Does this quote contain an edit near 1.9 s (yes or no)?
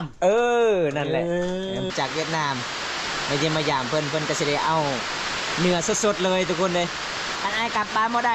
yes